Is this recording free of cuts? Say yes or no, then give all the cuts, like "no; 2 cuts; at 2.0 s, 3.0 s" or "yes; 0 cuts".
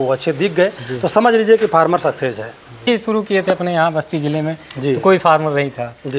no; 1 cut; at 2.9 s